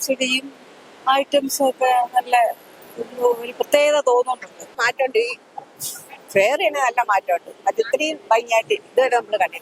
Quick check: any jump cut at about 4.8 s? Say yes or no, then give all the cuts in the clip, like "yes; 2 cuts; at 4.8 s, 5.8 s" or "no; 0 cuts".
yes; 1 cut; at 4.8 s